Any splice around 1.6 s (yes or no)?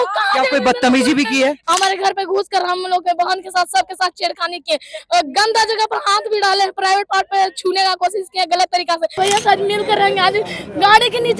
yes